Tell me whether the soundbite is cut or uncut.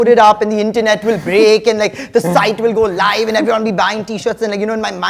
uncut